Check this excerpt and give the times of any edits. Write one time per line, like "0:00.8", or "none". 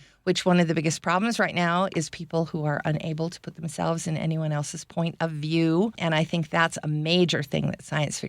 0:05.9